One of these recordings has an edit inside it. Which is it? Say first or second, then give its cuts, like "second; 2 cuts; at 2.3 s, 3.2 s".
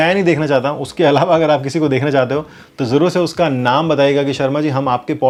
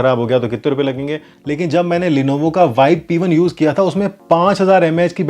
second; 1 cut; at 1.3 s